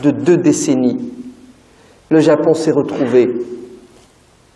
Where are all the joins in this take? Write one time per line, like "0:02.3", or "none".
0:02.3